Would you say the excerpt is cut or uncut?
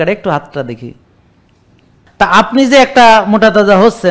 cut